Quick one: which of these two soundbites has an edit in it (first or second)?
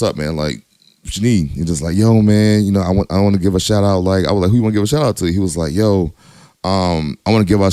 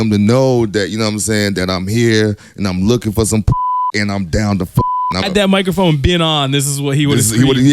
second